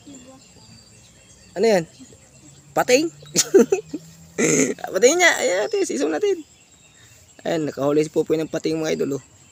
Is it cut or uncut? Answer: uncut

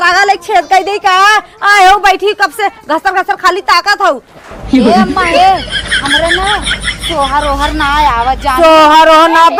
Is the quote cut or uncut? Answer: uncut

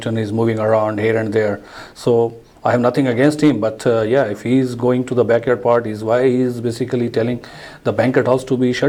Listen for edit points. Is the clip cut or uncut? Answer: uncut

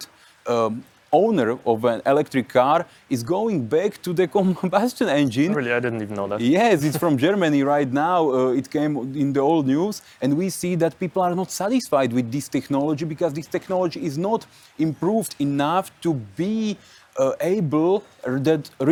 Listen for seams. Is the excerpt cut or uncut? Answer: uncut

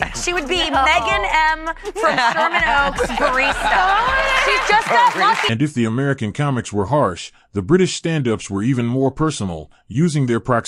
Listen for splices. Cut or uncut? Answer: uncut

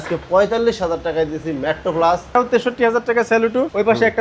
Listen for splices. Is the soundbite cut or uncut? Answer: cut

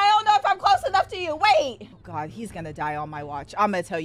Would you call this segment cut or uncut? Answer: cut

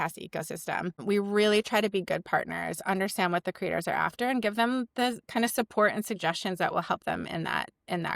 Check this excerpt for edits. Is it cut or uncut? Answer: cut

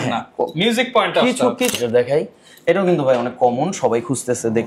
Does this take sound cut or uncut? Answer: cut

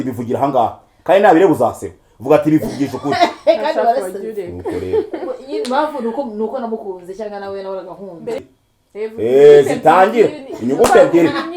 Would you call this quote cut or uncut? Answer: cut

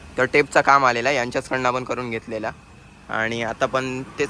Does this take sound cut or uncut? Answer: uncut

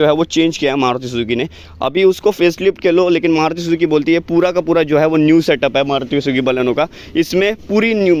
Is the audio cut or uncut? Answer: uncut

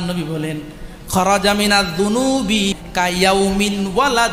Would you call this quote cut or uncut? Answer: cut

